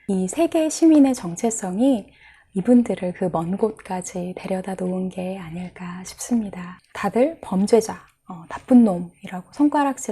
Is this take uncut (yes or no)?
no